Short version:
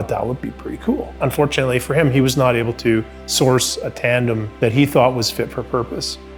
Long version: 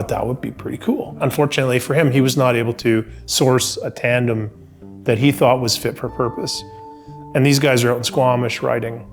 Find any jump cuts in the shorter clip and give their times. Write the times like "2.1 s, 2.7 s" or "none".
4.5 s